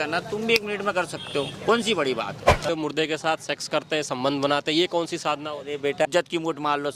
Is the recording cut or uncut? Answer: cut